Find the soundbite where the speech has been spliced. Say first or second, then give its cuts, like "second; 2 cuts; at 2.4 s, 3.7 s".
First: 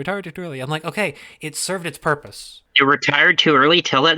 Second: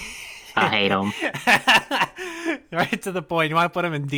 first; 1 cut; at 2.6 s